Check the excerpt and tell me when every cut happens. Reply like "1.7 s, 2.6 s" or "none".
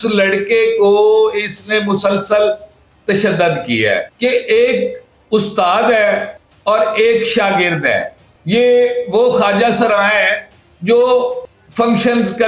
4.1 s